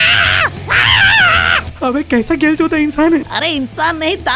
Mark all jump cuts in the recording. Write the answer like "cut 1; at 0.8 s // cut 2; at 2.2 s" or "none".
none